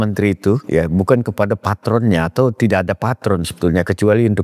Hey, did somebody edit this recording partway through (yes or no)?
no